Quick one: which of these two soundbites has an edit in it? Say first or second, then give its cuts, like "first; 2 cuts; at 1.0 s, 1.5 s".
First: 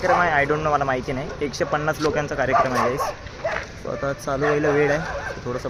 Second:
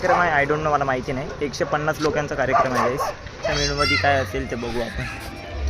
second; 1 cut; at 3.6 s